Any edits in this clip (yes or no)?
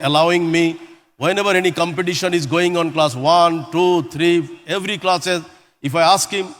no